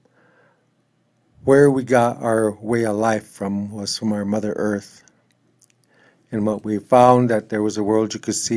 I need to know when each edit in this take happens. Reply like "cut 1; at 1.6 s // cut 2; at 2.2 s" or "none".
none